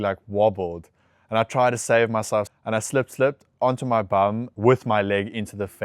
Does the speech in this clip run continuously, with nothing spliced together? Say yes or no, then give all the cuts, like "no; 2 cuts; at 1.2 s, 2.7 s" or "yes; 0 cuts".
no; 2 cuts; at 2.5 s, 4.5 s